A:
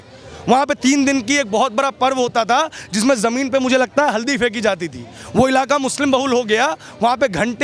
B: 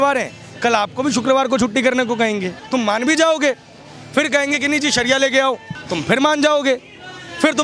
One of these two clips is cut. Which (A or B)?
B